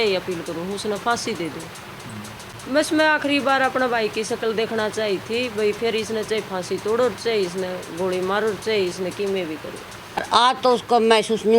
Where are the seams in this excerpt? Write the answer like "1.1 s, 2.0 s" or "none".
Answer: 2.5 s, 10.2 s